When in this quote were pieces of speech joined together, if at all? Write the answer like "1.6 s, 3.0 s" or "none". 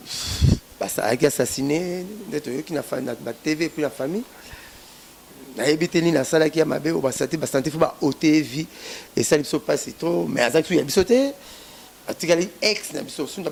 none